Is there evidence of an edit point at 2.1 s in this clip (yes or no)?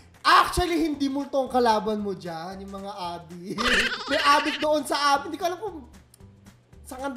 no